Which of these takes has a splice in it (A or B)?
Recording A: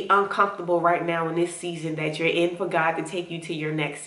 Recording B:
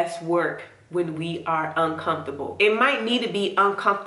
B